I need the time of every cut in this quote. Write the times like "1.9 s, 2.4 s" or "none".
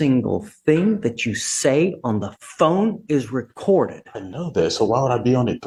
none